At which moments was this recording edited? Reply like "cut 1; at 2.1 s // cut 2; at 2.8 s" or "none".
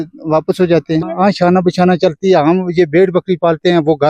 cut 1; at 1.1 s

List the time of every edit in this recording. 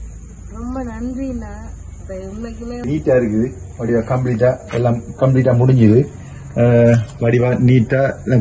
cut 1; at 2.8 s

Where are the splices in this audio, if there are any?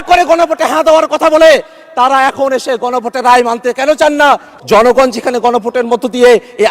cut 1; at 4.5 s

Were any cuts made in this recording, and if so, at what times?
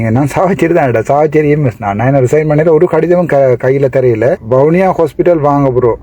cut 1; at 4.4 s

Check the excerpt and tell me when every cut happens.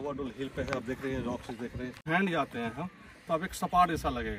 cut 1; at 2.1 s

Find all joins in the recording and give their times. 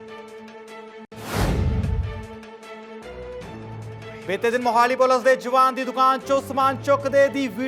cut 1; at 1.1 s // cut 2; at 4.1 s

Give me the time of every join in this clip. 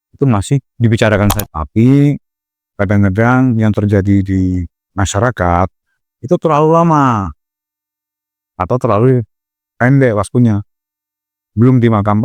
cut 1; at 1.4 s

